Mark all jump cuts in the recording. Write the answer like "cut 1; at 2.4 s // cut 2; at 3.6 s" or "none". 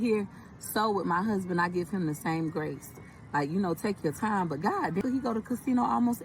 cut 1; at 5.0 s